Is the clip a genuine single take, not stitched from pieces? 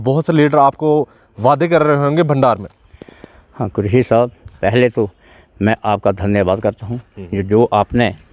yes; 0 cuts

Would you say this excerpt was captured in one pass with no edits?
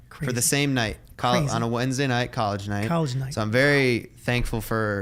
yes; 0 cuts

